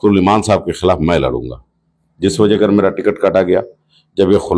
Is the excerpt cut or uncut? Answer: uncut